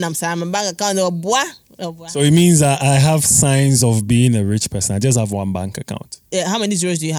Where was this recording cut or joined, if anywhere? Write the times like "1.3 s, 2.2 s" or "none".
6.3 s